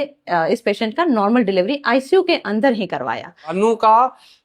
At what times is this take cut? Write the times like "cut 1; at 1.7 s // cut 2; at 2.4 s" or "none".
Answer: cut 1; at 3.4 s

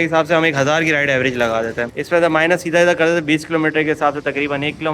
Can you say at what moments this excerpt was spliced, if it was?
cut 1; at 1.9 s

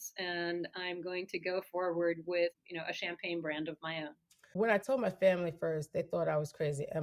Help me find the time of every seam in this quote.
cut 1; at 2.5 s // cut 2; at 4.4 s

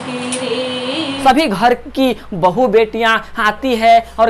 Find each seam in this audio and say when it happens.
cut 1; at 1.1 s

